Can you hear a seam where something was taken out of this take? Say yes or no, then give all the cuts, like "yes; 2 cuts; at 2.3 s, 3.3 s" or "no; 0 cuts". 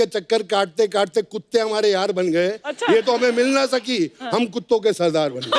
no; 0 cuts